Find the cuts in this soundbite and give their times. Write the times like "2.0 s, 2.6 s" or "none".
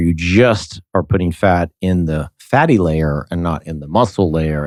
none